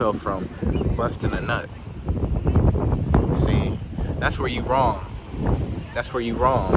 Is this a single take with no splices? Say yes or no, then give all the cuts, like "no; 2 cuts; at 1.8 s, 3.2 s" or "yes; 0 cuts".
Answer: yes; 0 cuts